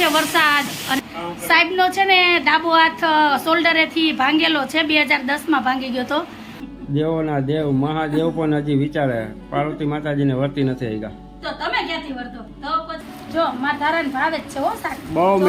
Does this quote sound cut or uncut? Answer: cut